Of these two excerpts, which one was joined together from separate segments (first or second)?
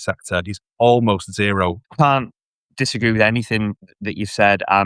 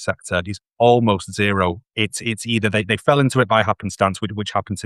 first